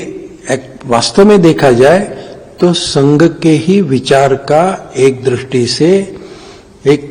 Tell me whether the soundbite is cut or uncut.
uncut